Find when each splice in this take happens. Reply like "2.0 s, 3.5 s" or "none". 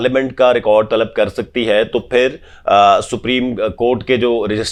none